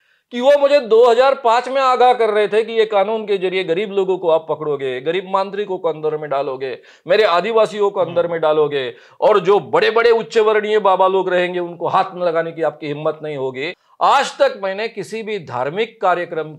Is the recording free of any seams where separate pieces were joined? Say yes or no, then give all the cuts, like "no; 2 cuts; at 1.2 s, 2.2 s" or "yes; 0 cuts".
no; 1 cut; at 13.8 s